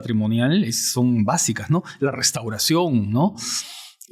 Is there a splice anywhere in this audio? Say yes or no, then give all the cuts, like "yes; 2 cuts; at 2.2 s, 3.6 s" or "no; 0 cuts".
no; 0 cuts